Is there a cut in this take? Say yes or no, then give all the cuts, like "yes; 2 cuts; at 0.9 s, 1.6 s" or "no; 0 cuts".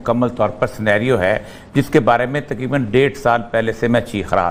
no; 0 cuts